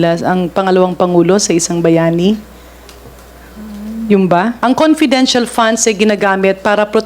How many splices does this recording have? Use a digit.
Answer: 1